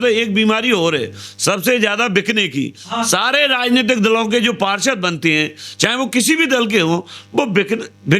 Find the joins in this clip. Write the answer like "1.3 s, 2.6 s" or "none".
none